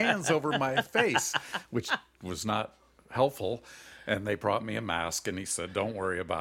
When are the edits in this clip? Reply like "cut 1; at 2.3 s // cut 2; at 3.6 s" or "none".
none

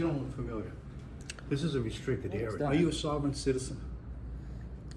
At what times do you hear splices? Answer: cut 1; at 2.5 s

